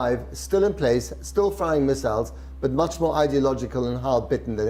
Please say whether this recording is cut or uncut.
uncut